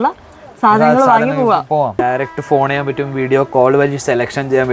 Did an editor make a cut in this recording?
yes; 1 cut; at 2.0 s

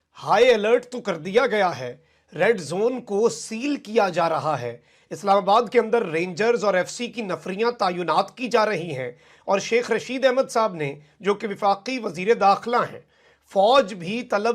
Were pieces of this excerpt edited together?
no; 0 cuts

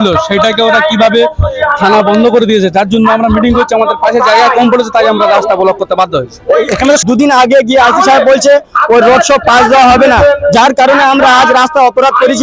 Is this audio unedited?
no; 1 cut; at 7.0 s

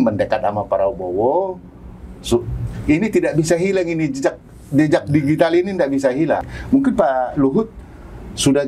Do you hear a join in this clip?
yes; 1 cut; at 6.5 s

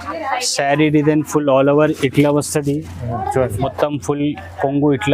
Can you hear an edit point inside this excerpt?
yes; 1 cut; at 3.7 s

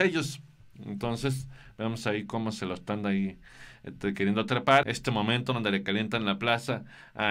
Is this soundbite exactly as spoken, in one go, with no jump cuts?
no; 1 cut; at 4.8 s

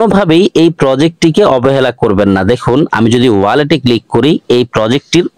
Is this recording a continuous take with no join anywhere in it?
yes; 0 cuts

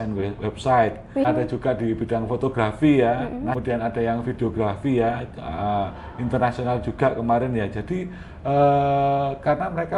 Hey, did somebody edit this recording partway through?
yes; 2 cuts; at 1.2 s, 3.6 s

